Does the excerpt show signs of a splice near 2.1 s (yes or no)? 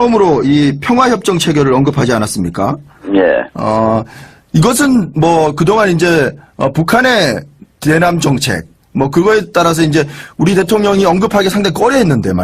no